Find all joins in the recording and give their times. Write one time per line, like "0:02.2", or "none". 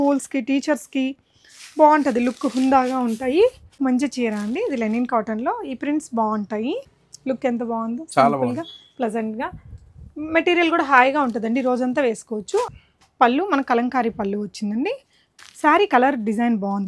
0:03.8
0:12.7
0:15.3

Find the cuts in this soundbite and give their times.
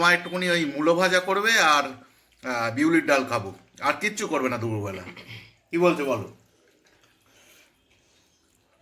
none

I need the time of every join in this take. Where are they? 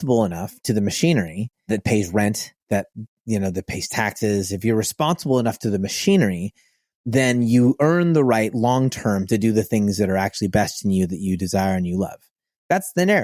0:01.7

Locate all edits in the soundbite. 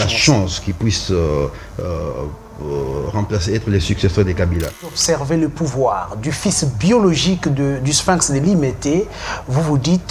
0:04.9

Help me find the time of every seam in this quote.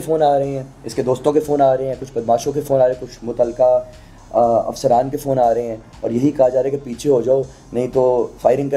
none

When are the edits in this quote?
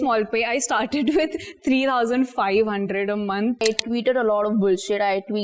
0:03.6

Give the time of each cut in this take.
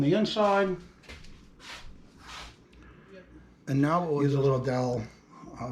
0:04.2

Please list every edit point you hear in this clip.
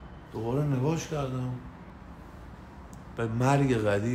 0:01.9

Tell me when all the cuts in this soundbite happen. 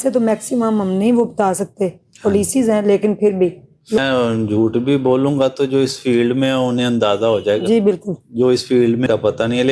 0:04.0

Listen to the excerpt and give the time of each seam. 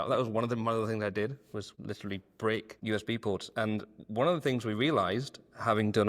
0:01.7
0:02.8

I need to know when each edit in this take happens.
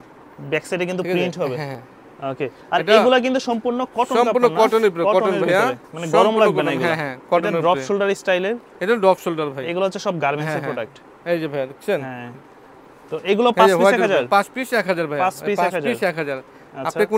none

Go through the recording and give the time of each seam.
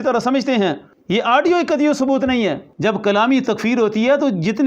0:00.9
0:02.7

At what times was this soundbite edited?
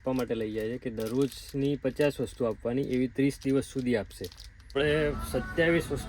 0:04.7

